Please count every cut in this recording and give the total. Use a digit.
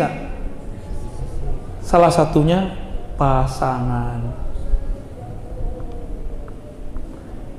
0